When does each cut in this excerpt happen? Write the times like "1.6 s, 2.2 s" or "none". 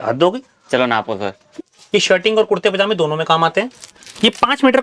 1.4 s